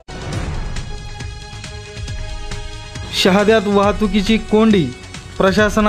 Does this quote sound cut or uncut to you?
cut